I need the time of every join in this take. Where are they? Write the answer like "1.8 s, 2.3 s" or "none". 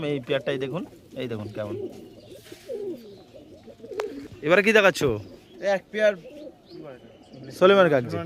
none